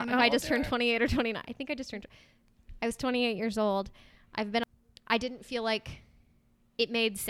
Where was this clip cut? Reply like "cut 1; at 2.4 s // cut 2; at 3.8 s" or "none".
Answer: cut 1; at 4.6 s